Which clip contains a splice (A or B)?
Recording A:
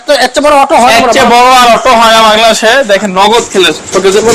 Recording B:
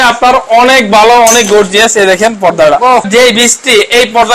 B